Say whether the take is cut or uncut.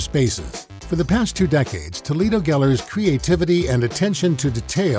uncut